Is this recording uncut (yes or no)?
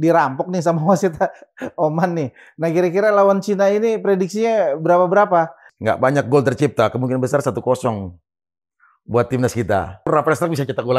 no